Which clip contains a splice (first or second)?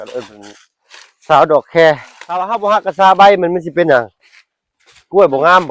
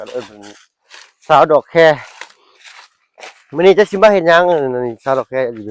first